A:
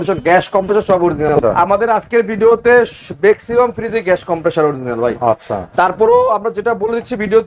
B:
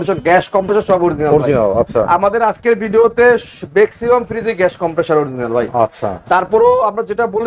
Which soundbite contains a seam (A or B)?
A